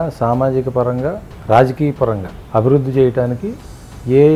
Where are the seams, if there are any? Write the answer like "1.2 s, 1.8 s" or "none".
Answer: 1.3 s, 2.3 s